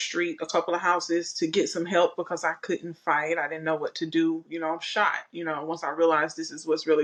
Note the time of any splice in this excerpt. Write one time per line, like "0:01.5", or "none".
none

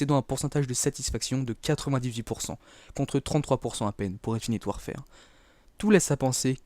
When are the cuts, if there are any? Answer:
0:02.9

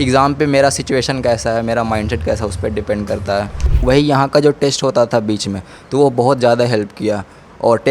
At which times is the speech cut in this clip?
0:03.7

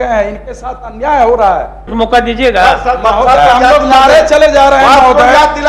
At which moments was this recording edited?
0:01.9

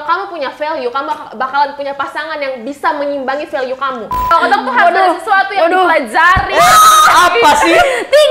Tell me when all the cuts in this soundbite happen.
0:04.3

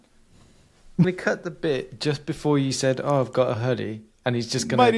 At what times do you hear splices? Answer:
0:01.0

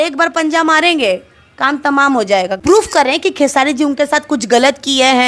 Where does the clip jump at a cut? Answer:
0:02.6

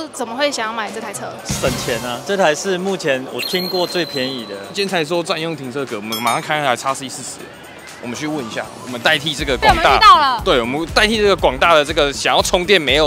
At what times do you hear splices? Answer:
0:04.7

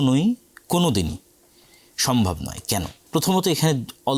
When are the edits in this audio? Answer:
0:03.0

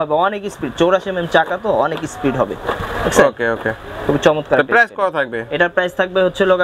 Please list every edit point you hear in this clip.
none

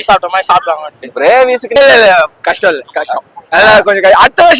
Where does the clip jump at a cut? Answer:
0:01.8

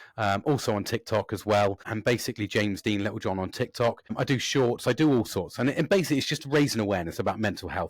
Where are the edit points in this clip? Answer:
0:01.9
0:04.1

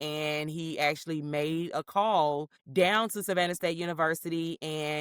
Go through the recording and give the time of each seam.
0:02.5

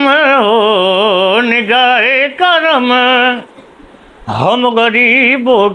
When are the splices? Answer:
none

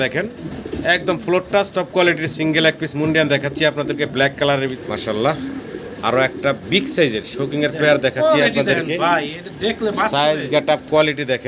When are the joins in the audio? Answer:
0:04.8

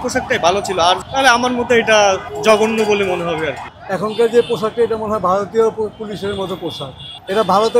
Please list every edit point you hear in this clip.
0:01.0
0:02.3
0:03.7

